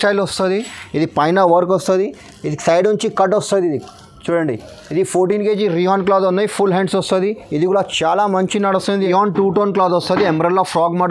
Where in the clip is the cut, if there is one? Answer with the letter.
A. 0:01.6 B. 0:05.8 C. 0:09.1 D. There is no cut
C